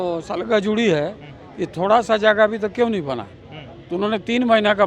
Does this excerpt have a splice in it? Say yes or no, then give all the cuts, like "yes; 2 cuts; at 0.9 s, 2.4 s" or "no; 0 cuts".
no; 0 cuts